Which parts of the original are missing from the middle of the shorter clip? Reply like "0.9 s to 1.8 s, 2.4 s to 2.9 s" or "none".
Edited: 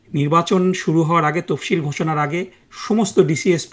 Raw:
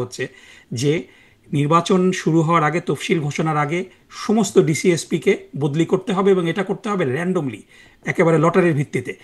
none